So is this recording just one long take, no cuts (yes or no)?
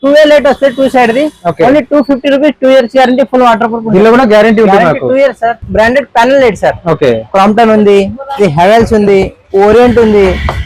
no